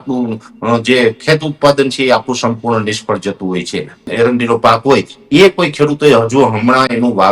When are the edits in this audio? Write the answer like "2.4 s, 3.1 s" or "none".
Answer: 4.0 s